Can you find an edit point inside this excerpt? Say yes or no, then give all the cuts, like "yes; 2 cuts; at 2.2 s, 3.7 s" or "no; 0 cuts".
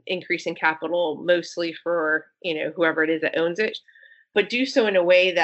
yes; 1 cut; at 3.9 s